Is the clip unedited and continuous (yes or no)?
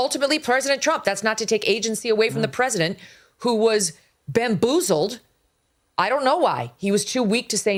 yes